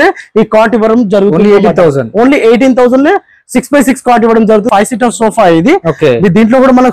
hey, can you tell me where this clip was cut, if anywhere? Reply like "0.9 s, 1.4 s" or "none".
4.7 s